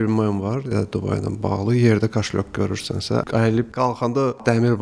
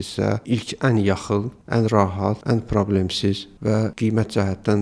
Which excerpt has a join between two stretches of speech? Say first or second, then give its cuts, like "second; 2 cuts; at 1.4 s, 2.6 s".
second; 3 cuts; at 1.6 s, 2.4 s, 3.6 s